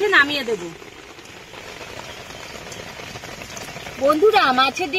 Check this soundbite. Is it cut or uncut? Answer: cut